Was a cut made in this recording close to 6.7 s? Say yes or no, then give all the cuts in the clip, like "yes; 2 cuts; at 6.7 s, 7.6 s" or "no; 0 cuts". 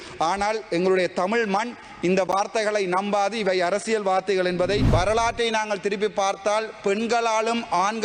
no; 1 cut; at 4.9 s